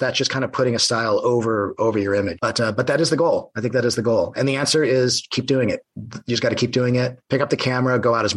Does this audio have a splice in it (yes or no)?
yes